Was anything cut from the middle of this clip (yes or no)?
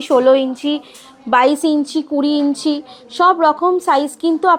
no